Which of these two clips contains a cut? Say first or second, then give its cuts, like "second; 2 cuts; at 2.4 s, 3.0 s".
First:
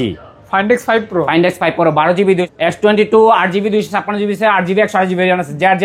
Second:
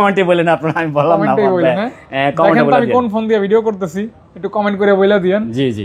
first; 1 cut; at 2.5 s